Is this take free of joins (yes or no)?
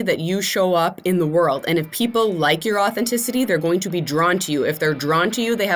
yes